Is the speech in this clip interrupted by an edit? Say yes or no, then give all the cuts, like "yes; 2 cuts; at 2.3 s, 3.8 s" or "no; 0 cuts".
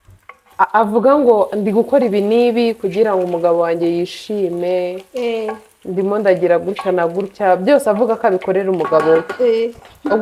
no; 0 cuts